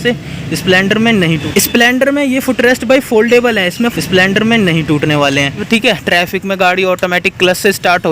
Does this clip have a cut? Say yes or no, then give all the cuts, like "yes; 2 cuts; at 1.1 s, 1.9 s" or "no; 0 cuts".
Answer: yes; 3 cuts; at 1.4 s, 3.9 s, 5.6 s